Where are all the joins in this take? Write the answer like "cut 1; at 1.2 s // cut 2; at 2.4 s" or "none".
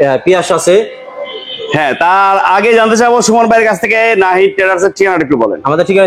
none